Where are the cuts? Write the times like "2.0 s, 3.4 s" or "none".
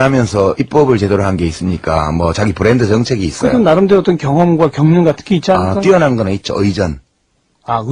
2.6 s